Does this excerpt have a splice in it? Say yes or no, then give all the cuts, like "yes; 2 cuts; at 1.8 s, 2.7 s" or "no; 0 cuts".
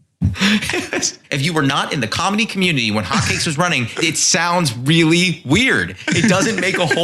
yes; 2 cuts; at 1.2 s, 4.0 s